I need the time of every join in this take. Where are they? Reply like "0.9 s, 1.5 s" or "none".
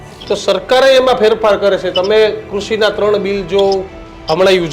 none